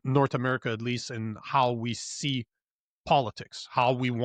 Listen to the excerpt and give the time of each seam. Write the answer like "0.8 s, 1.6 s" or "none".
none